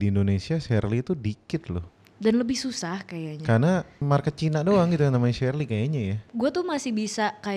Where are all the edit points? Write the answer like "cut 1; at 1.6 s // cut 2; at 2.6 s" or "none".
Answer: cut 1; at 4.0 s // cut 2; at 6.2 s